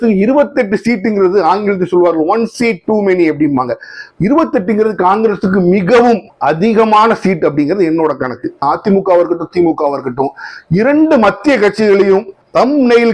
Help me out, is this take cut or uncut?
cut